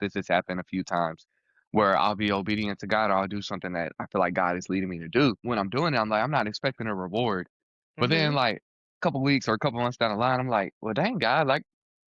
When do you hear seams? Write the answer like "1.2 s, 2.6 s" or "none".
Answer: 5.4 s